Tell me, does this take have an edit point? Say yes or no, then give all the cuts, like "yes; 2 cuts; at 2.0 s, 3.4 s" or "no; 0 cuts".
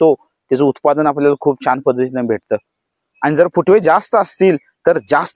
no; 0 cuts